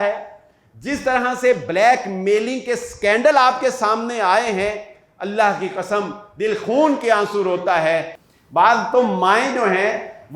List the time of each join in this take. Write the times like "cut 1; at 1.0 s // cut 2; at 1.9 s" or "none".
cut 1; at 8.2 s